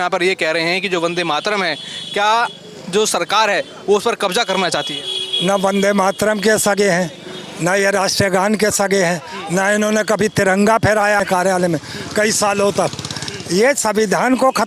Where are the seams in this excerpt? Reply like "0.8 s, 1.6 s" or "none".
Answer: none